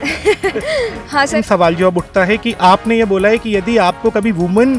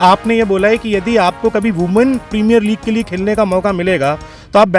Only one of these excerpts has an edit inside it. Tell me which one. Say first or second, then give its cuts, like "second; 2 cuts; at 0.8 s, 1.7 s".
first; 1 cut; at 1.4 s